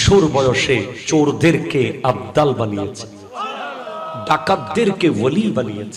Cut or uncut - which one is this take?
cut